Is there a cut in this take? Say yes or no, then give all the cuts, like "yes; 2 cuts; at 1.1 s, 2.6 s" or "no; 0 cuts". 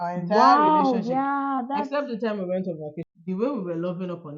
yes; 1 cut; at 3.1 s